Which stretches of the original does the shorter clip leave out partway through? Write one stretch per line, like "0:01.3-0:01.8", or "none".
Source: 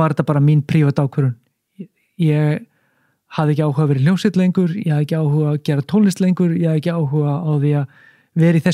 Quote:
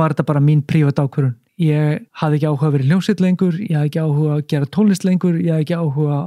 0:01.4-0:02.0
0:02.7-0:03.2